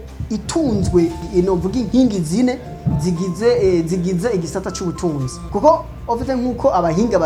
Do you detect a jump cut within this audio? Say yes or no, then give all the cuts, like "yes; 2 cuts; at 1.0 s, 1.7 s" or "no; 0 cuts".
no; 0 cuts